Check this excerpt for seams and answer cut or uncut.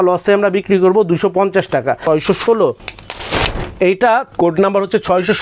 cut